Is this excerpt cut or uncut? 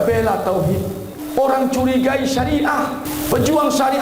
cut